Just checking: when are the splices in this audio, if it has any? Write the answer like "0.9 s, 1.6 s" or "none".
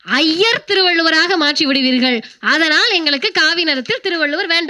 none